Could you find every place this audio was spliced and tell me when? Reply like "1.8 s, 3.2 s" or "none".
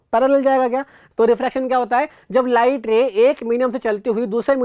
1.0 s